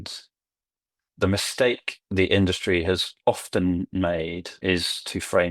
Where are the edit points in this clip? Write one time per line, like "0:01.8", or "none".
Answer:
0:01.0
0:04.6